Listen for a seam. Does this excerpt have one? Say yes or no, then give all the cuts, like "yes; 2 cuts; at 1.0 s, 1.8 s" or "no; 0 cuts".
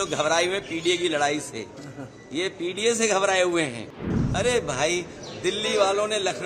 yes; 1 cut; at 4.1 s